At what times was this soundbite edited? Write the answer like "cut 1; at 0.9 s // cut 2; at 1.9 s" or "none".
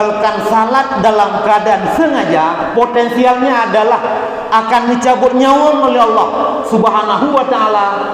none